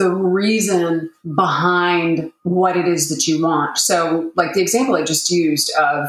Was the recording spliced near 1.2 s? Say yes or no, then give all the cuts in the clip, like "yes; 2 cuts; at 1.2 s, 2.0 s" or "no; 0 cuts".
yes; 1 cut; at 1.2 s